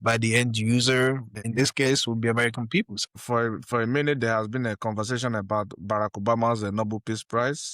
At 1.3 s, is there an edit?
yes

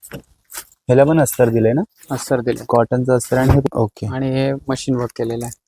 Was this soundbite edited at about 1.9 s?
no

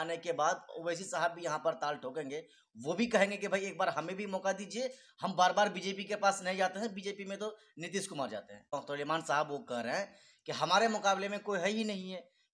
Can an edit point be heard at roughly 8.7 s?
yes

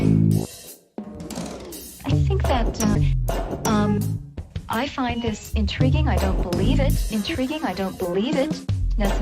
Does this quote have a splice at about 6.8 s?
no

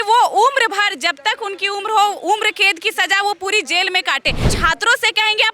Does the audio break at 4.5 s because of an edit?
yes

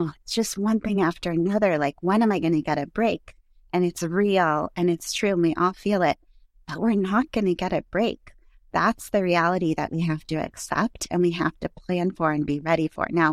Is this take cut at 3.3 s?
no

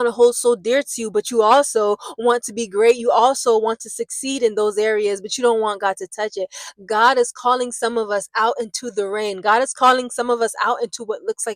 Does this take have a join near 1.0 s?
no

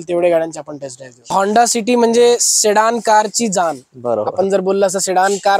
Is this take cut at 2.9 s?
no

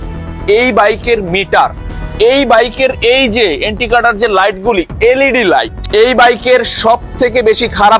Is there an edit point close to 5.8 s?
yes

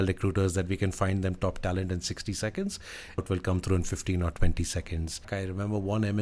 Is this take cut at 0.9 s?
no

